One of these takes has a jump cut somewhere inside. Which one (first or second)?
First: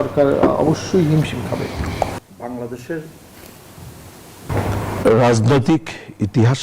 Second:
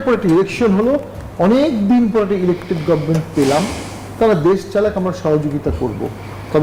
first